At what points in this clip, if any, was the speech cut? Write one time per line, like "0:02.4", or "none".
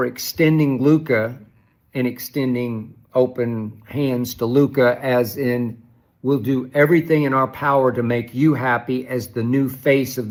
none